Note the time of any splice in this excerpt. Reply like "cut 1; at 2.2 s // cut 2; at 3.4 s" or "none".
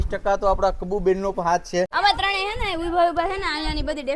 cut 1; at 1.9 s